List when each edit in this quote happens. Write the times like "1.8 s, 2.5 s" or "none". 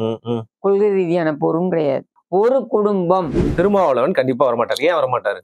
2.1 s, 3.5 s